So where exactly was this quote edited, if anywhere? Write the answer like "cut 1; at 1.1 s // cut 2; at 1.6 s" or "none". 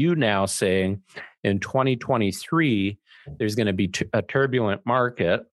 none

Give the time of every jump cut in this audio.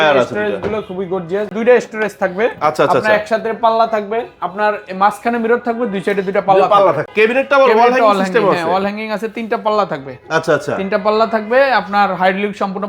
cut 1; at 1.5 s // cut 2; at 7.1 s

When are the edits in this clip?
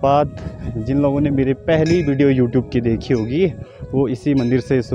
none

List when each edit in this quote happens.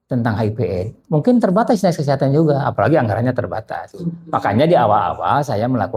none

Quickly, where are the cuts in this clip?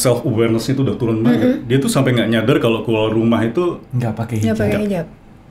none

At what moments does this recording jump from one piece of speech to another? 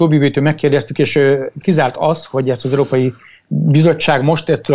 cut 1; at 1.6 s

